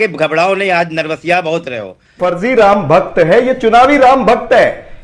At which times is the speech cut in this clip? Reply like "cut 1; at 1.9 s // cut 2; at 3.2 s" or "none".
cut 1; at 2.2 s